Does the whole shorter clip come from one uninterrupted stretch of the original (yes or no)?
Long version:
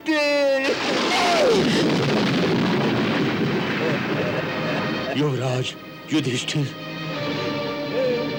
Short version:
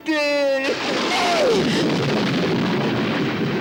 yes